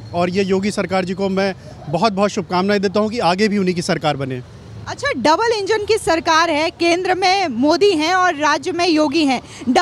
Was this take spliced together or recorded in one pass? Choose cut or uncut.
uncut